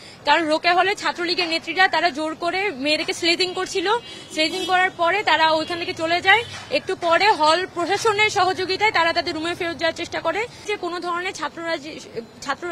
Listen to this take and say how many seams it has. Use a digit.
1